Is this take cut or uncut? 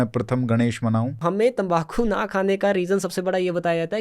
cut